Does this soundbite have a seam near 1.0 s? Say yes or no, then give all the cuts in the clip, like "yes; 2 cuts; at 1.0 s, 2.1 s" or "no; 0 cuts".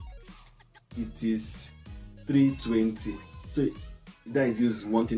yes; 1 cut; at 1.0 s